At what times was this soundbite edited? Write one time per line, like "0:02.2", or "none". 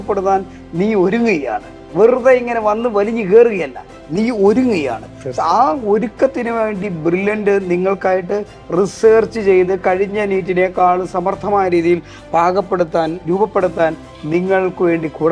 none